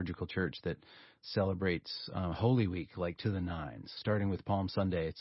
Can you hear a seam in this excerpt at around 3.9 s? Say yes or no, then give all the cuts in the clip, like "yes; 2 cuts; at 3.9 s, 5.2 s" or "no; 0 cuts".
yes; 2 cuts; at 1.2 s, 3.9 s